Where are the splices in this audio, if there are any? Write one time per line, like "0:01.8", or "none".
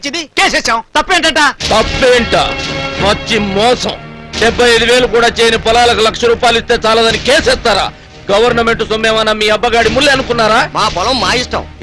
none